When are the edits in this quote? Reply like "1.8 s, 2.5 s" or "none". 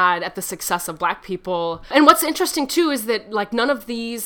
1.9 s